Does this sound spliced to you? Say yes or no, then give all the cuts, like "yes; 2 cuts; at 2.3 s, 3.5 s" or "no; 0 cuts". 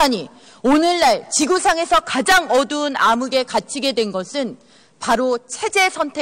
yes; 1 cut; at 2.3 s